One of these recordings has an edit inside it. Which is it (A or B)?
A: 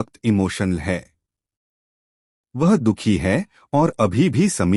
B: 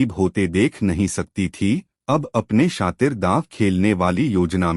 B